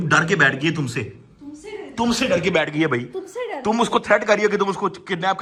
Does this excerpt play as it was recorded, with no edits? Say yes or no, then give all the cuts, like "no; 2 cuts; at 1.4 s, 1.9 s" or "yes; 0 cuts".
yes; 0 cuts